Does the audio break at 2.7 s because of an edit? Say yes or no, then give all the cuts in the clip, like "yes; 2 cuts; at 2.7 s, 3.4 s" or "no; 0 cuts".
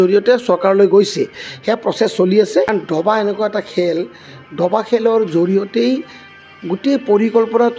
yes; 1 cut; at 2.7 s